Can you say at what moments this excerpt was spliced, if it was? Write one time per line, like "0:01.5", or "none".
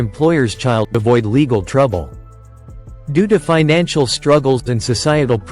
0:01.0